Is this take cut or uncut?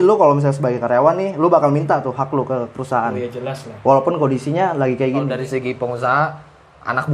cut